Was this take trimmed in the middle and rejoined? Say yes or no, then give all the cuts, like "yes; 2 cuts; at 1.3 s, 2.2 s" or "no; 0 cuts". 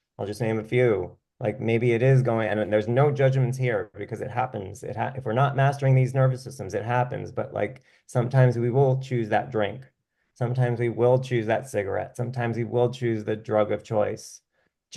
no; 0 cuts